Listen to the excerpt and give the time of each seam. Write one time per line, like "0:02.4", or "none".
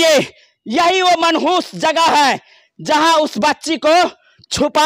none